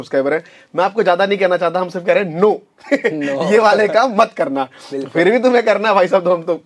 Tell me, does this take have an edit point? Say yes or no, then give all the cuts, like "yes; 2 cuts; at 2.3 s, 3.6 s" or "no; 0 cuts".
no; 0 cuts